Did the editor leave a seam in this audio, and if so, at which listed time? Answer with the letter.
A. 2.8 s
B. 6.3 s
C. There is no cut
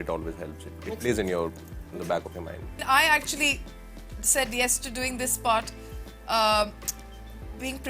A